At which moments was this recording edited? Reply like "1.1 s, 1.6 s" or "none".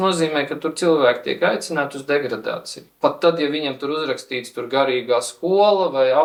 none